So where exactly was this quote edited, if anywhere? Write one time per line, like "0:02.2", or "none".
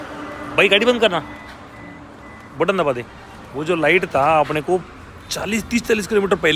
none